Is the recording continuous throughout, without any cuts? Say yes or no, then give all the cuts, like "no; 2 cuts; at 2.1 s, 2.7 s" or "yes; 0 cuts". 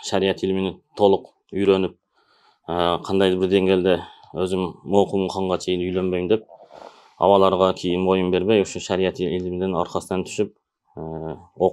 yes; 0 cuts